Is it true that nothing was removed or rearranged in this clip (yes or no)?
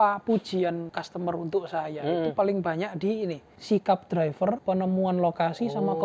no